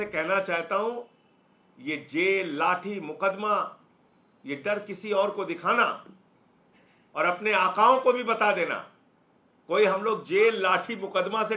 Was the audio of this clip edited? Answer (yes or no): no